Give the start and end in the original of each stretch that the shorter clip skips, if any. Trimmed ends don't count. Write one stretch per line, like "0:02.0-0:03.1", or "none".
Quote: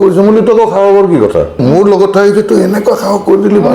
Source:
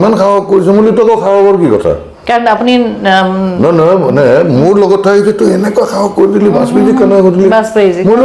0:02.1-0:04.5